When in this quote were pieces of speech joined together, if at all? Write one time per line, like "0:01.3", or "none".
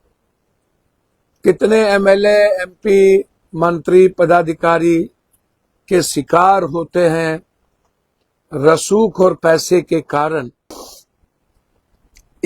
0:10.7